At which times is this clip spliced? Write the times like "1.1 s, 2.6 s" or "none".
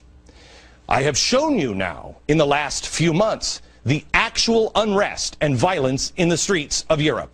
4.1 s